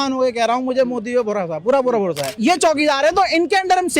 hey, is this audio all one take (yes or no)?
no